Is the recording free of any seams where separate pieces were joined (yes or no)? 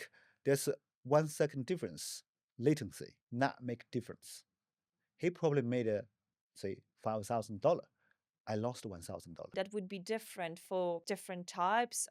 no